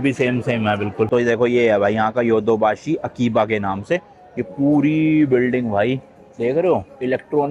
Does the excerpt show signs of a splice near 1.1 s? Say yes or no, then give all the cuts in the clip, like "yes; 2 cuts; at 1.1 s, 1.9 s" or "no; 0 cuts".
yes; 1 cut; at 1.1 s